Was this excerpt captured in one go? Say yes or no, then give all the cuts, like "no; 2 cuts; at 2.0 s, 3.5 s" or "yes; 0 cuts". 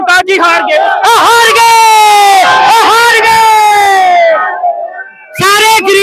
yes; 0 cuts